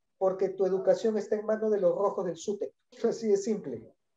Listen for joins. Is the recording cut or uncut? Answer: cut